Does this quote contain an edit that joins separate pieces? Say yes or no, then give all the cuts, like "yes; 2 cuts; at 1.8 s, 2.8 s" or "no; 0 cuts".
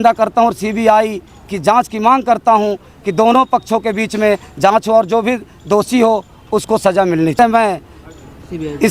yes; 1 cut; at 7.4 s